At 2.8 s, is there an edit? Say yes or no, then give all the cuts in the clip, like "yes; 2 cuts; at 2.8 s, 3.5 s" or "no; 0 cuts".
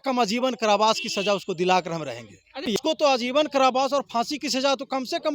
yes; 1 cut; at 2.8 s